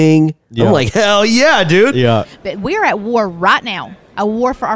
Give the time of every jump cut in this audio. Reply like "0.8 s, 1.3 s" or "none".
2.3 s